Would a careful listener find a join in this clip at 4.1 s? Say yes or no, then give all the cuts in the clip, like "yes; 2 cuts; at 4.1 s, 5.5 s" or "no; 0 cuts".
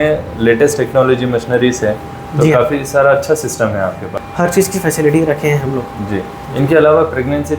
yes; 1 cut; at 4.1 s